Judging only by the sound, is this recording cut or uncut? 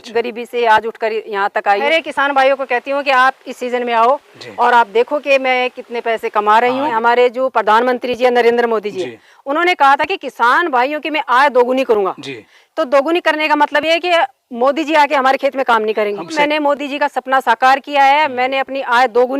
cut